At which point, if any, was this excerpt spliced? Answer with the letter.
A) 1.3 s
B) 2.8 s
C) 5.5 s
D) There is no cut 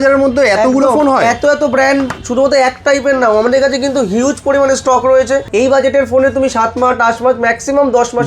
C